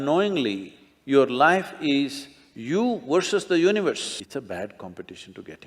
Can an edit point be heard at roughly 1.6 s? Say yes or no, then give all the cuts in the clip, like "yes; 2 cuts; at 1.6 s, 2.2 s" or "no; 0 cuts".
no; 1 cut; at 4.1 s